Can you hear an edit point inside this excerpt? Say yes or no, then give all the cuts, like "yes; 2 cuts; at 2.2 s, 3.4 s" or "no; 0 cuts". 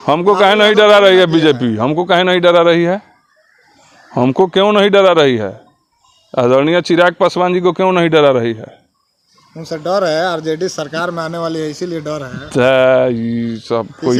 no; 0 cuts